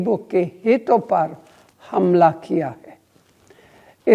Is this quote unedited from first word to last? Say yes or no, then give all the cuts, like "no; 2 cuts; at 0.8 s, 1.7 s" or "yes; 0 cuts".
yes; 0 cuts